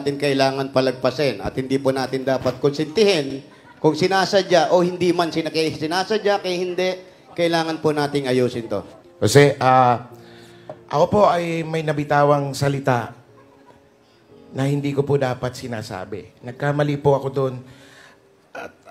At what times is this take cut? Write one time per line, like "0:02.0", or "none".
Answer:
none